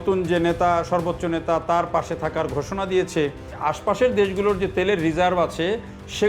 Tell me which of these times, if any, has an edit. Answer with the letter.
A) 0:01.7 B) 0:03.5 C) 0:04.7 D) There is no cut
B